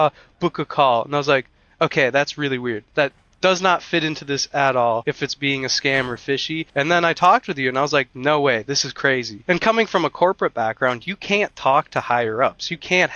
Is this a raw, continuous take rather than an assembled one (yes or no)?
no